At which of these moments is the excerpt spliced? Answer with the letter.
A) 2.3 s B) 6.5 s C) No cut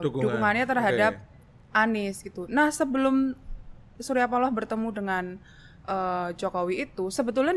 C